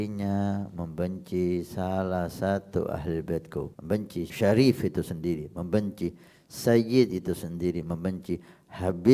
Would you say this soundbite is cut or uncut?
cut